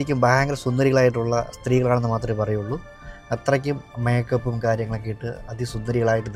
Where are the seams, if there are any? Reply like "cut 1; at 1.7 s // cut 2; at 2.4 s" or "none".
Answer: none